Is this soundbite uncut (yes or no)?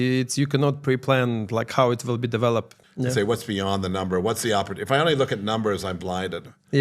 no